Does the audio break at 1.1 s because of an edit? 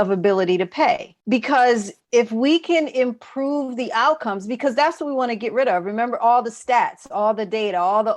yes; 2 cuts; at 1.1 s, 1.9 s

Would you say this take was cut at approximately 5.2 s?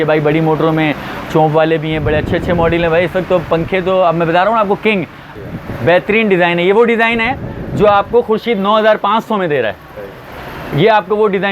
yes; 1 cut; at 5.2 s

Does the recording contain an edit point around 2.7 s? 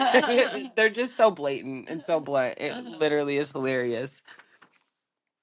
no; 0 cuts

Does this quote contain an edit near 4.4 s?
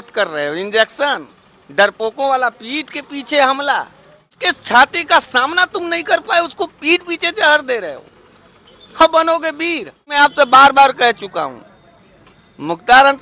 yes; 2 cuts; at 4.4 s, 10.1 s

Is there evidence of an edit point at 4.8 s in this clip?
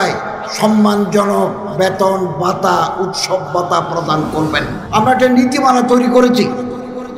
yes; 1 cut; at 4.8 s

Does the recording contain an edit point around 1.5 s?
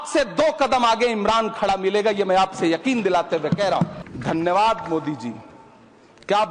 no; 1 cut; at 4.0 s

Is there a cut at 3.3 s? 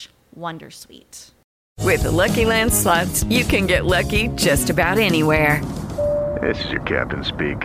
no; 1 cut; at 1.4 s

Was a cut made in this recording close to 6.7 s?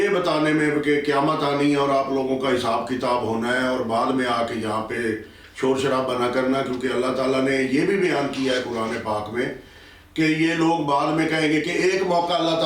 no; 0 cuts

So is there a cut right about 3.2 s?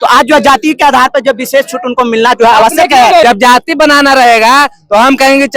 yes; 1 cut; at 3.2 s

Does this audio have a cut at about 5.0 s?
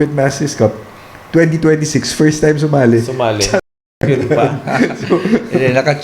no; 0 cuts

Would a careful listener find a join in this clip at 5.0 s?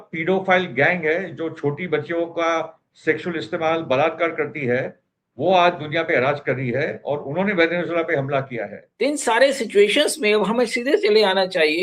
no; 1 cut; at 8.8 s

